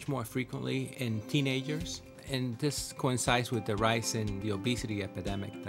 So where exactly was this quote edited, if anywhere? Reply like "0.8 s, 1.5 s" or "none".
0.9 s, 2.2 s, 4.4 s